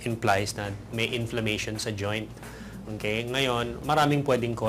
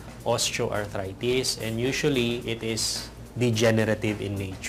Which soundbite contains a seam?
first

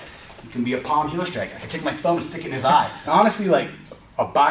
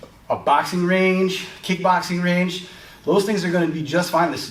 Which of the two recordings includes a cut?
first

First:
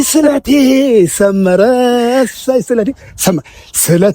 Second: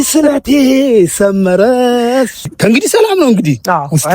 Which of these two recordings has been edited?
second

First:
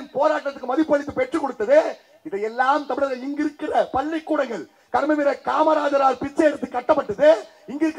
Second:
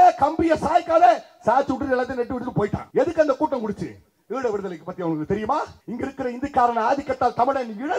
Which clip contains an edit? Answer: second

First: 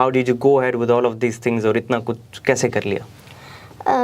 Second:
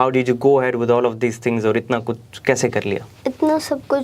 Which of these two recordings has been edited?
second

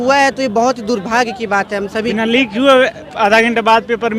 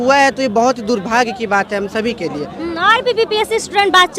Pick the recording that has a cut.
first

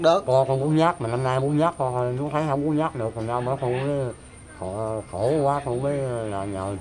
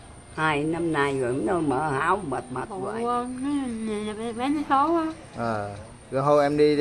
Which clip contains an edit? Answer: second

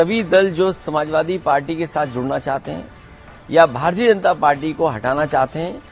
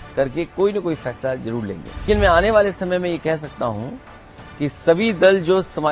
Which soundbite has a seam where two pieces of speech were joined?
second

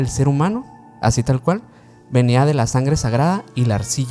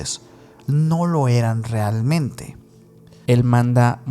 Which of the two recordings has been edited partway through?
second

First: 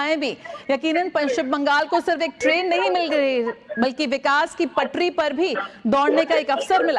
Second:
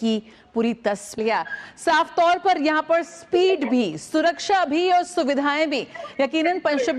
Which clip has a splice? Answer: second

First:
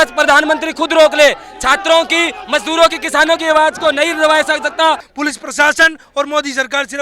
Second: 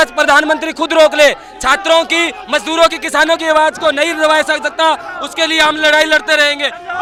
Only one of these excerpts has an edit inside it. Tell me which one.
first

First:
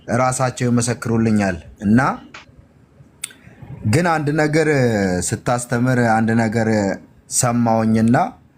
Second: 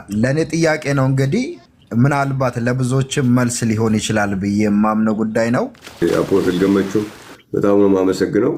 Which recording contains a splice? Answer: second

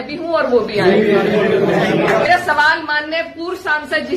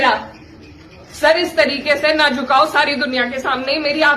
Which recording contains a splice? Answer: first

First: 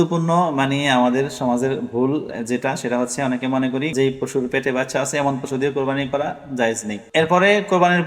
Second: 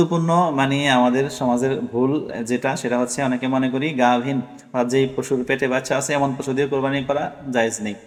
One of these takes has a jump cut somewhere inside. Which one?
first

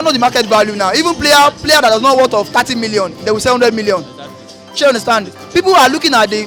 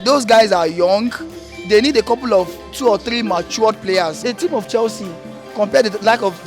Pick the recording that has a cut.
second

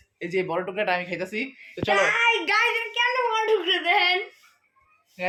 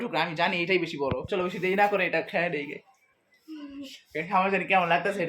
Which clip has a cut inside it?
second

